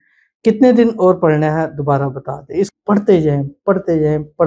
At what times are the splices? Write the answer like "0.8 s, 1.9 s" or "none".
2.7 s